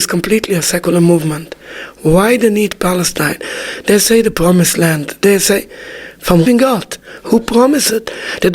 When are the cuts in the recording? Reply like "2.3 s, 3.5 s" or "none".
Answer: 6.5 s